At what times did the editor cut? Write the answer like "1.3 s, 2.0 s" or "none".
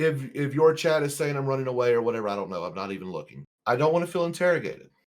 3.4 s